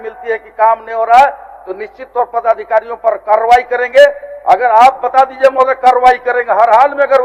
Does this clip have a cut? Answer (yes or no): no